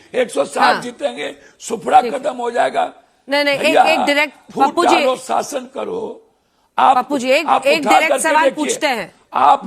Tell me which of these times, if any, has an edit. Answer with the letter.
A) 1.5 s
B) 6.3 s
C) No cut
C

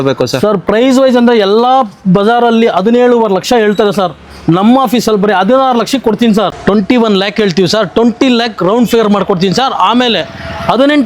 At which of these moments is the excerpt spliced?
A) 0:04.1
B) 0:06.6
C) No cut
B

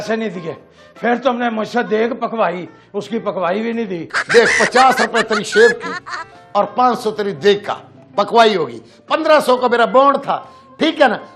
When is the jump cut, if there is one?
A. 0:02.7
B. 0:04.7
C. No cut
C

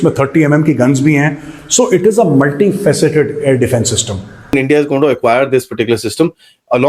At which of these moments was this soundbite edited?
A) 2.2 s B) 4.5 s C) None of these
B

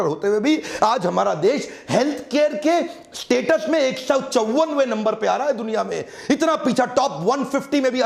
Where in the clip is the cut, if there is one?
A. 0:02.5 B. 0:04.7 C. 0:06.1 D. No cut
D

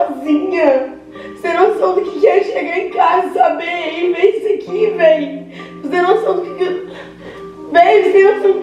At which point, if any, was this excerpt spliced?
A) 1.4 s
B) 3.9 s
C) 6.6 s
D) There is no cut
D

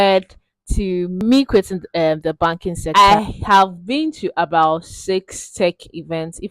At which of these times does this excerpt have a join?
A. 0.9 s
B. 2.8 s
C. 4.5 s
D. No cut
B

